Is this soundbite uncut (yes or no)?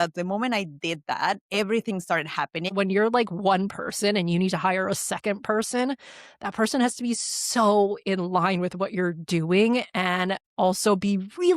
no